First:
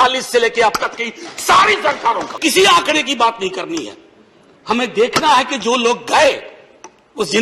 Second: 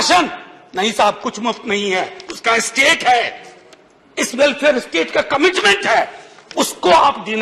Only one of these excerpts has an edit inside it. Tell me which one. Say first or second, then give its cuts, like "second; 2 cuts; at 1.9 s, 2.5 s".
first; 1 cut; at 2.3 s